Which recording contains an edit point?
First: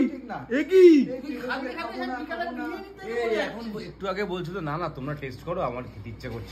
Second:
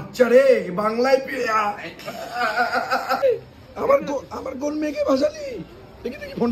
second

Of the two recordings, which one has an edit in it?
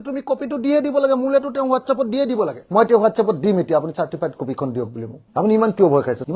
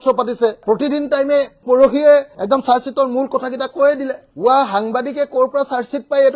first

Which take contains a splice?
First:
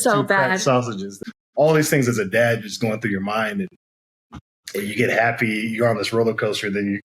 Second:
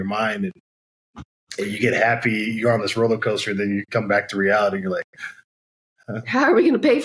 first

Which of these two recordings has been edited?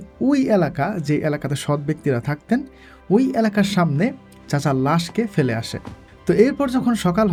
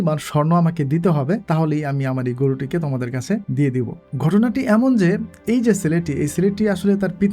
second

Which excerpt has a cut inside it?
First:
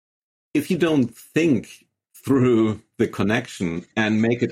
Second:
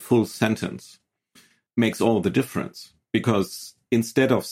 second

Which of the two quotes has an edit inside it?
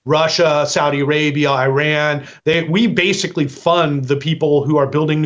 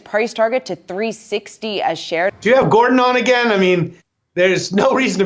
second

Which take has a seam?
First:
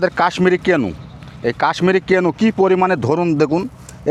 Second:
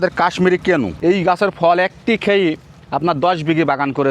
second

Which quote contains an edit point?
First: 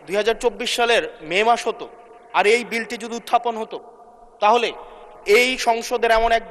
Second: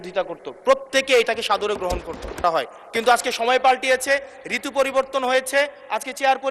second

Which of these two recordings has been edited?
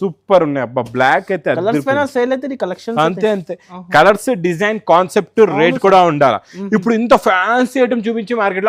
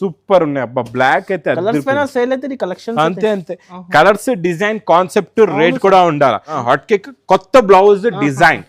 second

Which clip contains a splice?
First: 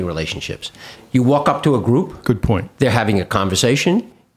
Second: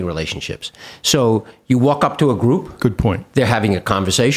first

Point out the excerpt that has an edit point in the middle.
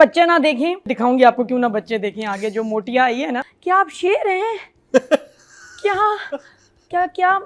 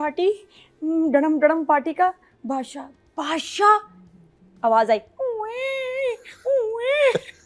first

